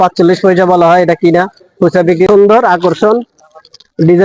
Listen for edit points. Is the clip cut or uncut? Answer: cut